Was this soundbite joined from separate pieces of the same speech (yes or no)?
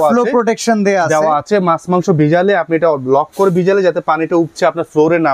no